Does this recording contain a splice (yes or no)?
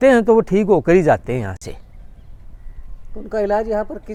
no